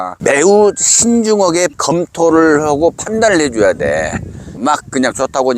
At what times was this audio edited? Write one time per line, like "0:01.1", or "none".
0:04.5